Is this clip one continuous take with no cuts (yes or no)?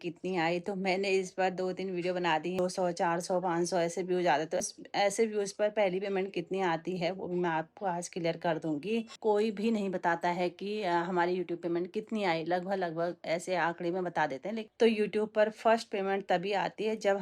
no